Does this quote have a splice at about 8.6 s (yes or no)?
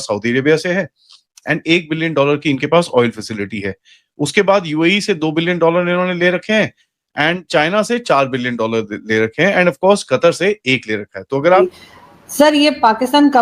no